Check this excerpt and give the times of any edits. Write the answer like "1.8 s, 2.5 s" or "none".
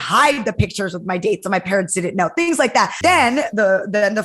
2.9 s